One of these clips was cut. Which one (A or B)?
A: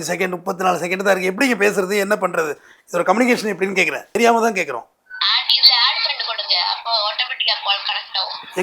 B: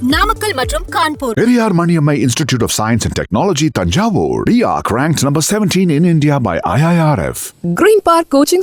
A